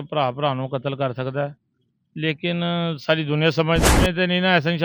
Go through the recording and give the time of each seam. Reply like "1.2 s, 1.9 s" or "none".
3.8 s